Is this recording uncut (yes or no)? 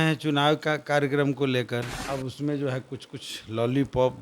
no